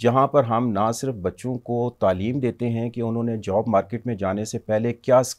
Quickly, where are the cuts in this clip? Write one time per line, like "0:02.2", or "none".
none